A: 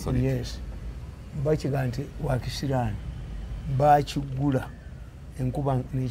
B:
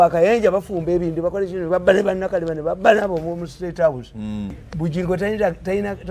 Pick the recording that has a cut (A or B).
B